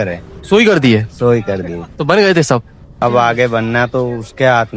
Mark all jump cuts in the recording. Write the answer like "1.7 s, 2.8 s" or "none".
3.0 s